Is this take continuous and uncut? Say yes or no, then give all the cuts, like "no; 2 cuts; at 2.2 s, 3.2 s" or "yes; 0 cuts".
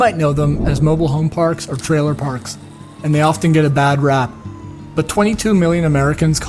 yes; 0 cuts